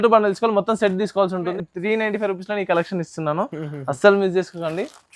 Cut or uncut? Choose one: cut